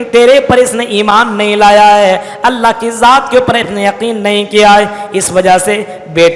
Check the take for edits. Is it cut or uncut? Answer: uncut